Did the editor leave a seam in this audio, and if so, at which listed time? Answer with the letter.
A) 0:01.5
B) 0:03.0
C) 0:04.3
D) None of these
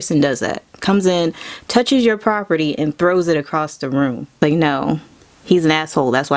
C